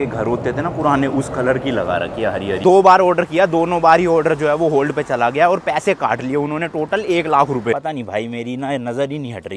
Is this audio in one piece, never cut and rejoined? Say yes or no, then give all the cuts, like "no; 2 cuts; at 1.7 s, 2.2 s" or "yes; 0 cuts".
no; 2 cuts; at 2.6 s, 7.7 s